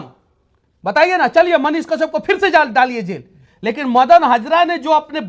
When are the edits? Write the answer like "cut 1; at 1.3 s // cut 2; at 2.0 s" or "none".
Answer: none